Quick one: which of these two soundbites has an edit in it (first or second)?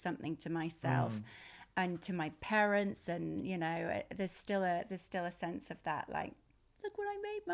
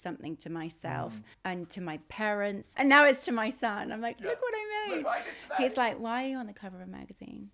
second